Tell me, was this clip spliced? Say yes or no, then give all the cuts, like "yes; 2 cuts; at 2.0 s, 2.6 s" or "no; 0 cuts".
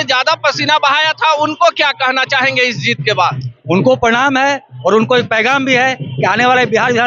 no; 0 cuts